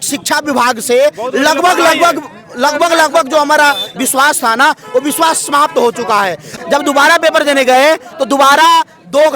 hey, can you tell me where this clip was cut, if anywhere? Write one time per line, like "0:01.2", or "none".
0:06.5